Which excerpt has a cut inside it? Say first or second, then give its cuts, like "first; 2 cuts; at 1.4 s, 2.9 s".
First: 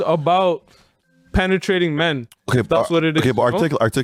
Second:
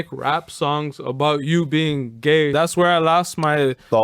second; 1 cut; at 2.5 s